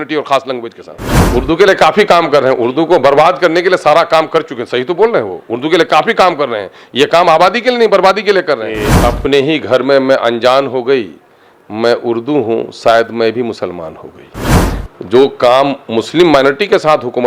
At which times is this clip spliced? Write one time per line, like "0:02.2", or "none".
0:01.3
0:08.9